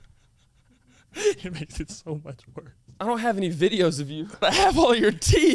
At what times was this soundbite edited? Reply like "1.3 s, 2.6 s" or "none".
3.0 s, 4.4 s